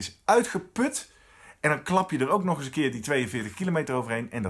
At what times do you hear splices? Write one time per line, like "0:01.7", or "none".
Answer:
none